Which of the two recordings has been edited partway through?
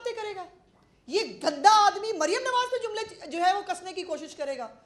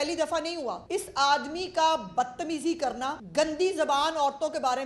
second; 2 cuts; at 0.8 s, 3.2 s

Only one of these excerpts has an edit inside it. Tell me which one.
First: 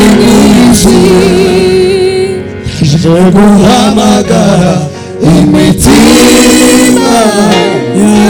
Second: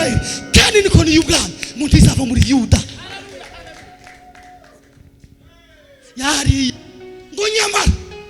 second; 1 cut; at 6.7 s

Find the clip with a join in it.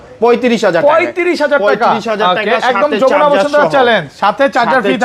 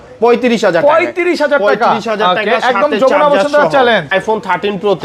second; 1 cut; at 4.1 s

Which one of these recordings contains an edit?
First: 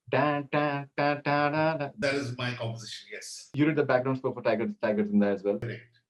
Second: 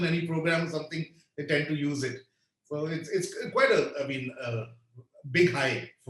first; 2 cuts; at 1.9 s, 3.4 s

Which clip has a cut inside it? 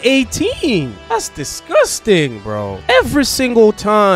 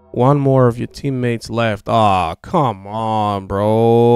first; 1 cut; at 1.0 s

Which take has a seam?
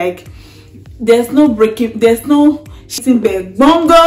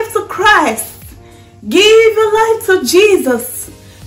first; 1 cut; at 3.0 s

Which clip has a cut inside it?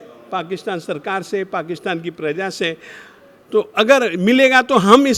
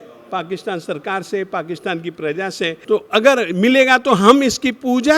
second; 1 cut; at 2.8 s

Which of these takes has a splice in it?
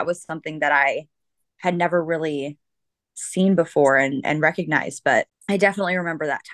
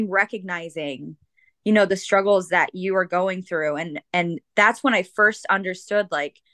first; 1 cut; at 5.4 s

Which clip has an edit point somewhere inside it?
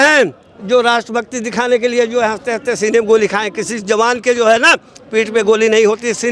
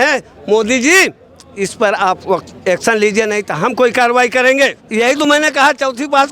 second; 1 cut; at 4.8 s

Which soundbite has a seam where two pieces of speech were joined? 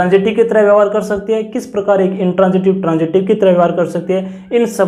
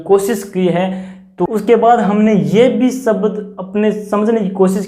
second; 1 cut; at 1.5 s

